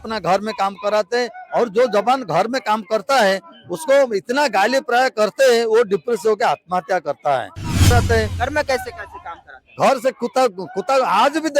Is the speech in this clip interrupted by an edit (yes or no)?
yes